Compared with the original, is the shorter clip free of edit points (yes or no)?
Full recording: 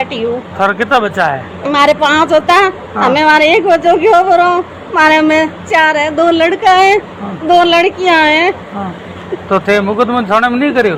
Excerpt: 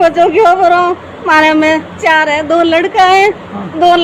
yes